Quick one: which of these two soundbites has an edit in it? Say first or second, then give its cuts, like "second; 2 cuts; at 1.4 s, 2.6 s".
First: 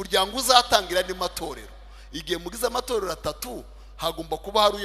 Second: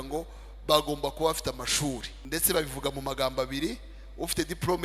second; 1 cut; at 2.1 s